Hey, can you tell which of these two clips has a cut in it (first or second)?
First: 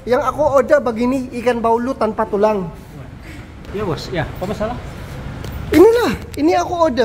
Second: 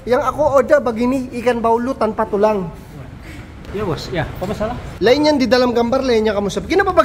second